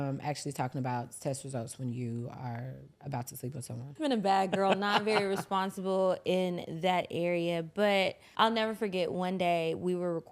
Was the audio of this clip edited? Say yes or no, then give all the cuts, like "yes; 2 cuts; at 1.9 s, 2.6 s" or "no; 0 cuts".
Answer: yes; 2 cuts; at 3.8 s, 8.2 s